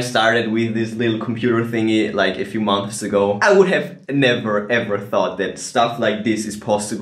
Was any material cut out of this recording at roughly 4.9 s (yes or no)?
no